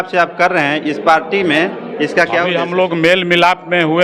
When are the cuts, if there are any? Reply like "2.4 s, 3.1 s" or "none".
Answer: 2.6 s